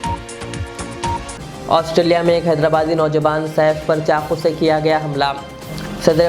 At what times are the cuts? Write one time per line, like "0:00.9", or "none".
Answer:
0:01.3